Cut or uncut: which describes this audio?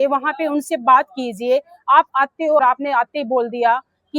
cut